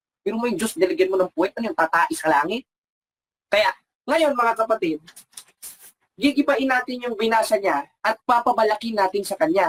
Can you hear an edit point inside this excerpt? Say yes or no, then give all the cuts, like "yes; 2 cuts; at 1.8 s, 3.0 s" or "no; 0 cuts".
no; 0 cuts